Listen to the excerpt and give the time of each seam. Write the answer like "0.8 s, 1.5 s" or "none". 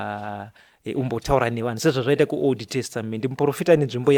none